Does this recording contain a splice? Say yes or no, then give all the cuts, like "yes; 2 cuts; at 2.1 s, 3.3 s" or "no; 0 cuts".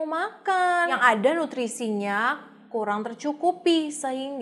yes; 1 cut; at 1.0 s